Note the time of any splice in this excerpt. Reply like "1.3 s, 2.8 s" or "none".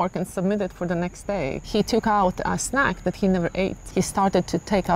1.6 s, 3.8 s